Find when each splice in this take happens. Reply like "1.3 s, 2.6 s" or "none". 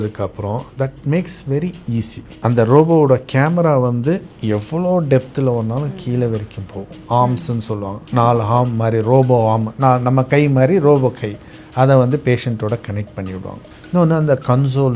2.2 s, 7.0 s, 13.6 s